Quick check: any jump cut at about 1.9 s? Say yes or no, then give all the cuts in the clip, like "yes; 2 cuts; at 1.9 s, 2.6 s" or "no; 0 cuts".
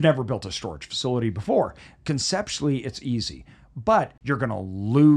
no; 1 cut; at 4.2 s